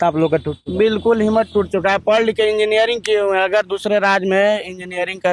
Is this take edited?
no; 0 cuts

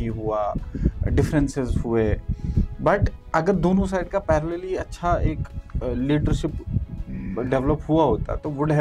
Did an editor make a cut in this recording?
no; 0 cuts

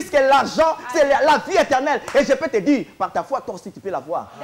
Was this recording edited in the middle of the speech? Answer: no; 0 cuts

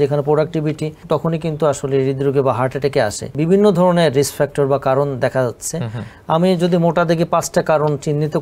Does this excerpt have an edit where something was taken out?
yes; 2 cuts; at 0.9 s, 3.3 s

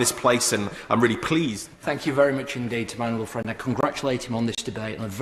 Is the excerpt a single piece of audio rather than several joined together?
no; 1 cut; at 1.7 s

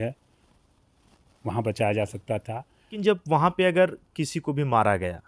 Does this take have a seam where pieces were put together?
yes; 1 cut; at 2.9 s

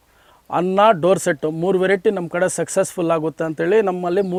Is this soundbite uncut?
yes; 0 cuts

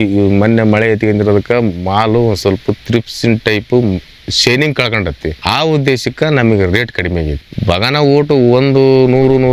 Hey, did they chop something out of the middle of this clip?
no; 0 cuts

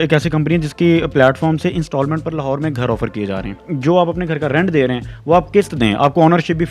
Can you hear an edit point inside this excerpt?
yes; 1 cut; at 3.7 s

